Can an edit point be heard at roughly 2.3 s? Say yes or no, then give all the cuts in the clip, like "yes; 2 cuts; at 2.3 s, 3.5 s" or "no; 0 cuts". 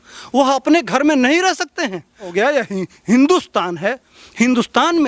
yes; 1 cut; at 2.3 s